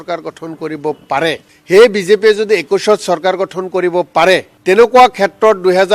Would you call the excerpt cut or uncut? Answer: cut